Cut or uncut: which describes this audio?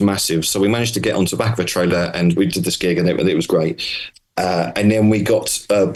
uncut